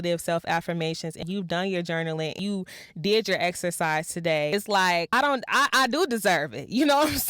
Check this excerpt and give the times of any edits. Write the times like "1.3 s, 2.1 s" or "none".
1.2 s, 2.4 s, 4.7 s